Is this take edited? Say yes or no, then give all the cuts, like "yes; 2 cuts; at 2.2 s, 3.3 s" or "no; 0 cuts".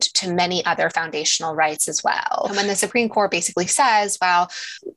yes; 1 cut; at 2.5 s